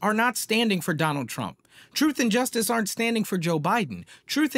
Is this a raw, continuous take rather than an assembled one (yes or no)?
yes